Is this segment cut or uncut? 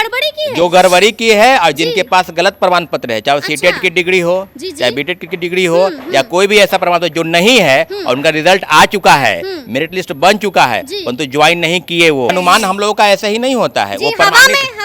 cut